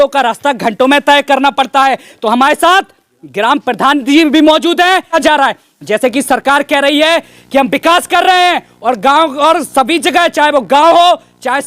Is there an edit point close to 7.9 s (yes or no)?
no